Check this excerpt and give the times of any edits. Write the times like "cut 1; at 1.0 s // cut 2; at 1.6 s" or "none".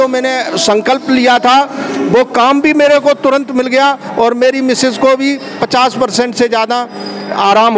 none